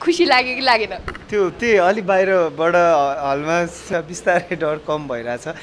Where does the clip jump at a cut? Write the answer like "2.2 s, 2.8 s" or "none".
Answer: 3.8 s